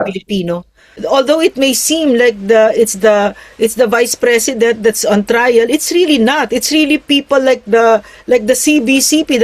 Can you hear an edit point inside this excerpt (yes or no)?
yes